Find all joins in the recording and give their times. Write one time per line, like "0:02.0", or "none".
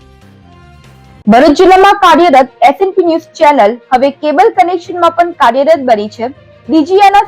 0:01.2